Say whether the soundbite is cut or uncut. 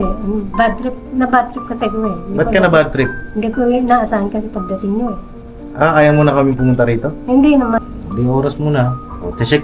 cut